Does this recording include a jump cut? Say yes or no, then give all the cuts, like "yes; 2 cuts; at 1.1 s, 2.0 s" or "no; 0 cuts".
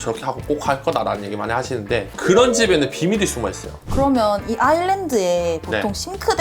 yes; 1 cut; at 3.8 s